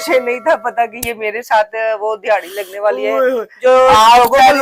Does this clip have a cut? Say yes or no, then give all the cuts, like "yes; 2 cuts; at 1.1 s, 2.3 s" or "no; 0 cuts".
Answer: no; 0 cuts